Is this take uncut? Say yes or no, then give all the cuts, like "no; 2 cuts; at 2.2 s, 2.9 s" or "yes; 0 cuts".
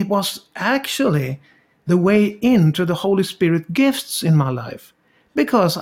yes; 0 cuts